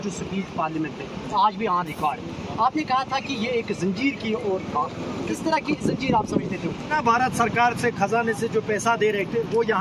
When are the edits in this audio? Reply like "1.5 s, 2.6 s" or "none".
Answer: 5.2 s, 6.9 s